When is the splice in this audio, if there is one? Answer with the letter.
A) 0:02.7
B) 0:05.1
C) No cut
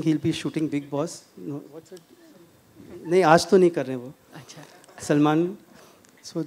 C